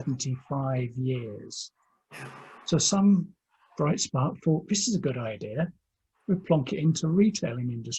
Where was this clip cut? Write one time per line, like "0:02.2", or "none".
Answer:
none